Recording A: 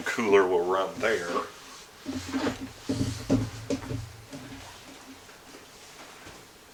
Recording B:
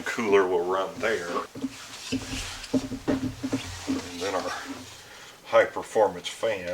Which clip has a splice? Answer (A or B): B